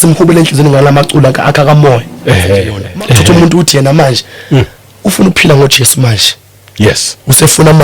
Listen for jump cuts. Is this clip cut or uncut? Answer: cut